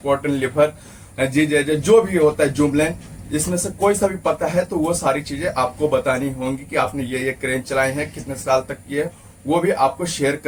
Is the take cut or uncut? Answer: uncut